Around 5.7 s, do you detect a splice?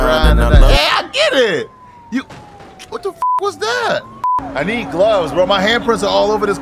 no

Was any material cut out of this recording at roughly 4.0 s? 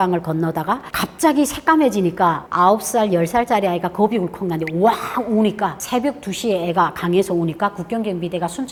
no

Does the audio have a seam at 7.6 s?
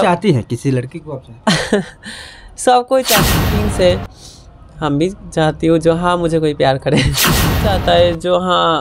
yes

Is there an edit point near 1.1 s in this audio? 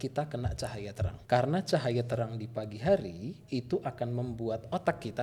yes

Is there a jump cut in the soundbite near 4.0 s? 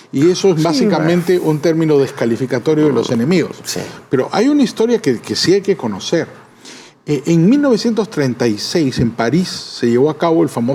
no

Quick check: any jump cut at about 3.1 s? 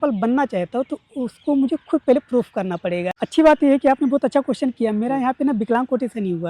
yes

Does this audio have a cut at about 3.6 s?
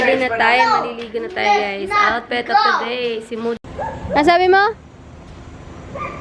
yes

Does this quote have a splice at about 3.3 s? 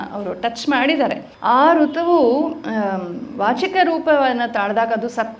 no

